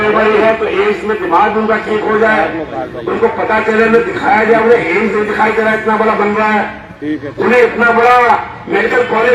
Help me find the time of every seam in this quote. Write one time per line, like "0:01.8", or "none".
none